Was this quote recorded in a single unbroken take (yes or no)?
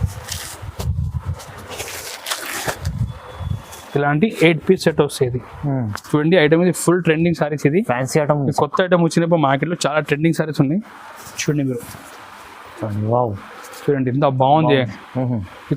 no